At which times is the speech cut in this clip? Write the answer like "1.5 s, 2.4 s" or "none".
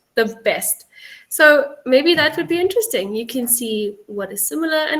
none